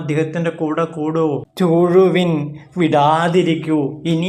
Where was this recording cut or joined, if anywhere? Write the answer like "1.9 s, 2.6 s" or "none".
1.5 s